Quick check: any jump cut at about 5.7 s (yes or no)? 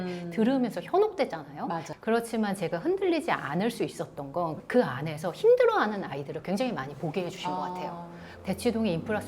no